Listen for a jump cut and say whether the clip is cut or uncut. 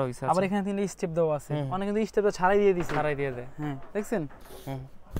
uncut